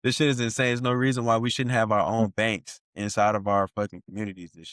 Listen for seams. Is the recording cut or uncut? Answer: uncut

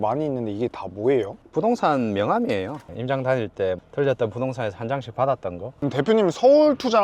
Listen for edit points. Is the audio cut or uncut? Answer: cut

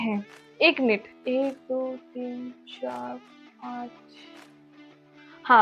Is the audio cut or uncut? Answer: cut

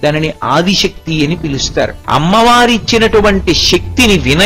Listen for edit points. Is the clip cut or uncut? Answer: cut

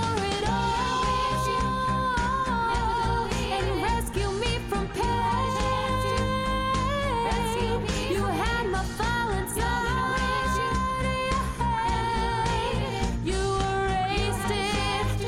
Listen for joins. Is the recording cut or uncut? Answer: uncut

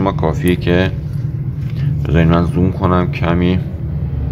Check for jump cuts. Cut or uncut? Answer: uncut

